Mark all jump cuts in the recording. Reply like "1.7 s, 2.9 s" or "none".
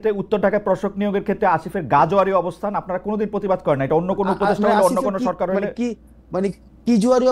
none